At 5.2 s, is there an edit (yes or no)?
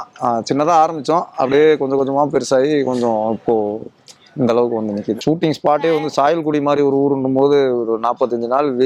yes